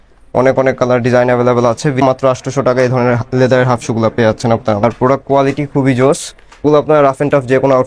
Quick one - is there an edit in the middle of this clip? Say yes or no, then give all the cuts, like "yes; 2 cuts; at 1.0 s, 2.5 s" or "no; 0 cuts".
yes; 3 cuts; at 2.0 s, 4.8 s, 6.6 s